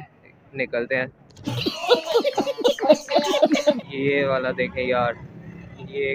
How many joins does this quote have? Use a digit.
0